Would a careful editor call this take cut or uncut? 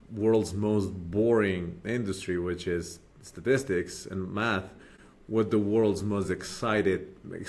uncut